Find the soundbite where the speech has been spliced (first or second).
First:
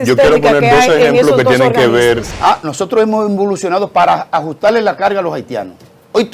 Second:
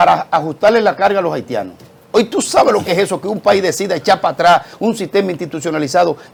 first